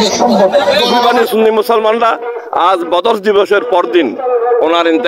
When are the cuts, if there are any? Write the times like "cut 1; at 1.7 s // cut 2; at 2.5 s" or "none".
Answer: cut 1; at 1.1 s